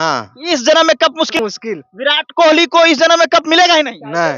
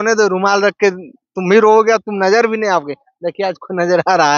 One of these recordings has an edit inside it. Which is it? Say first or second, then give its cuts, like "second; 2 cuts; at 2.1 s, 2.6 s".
first; 1 cut; at 1.4 s